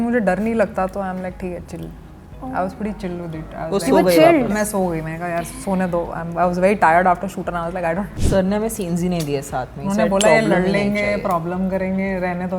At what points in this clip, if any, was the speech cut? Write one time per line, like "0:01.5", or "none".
0:08.1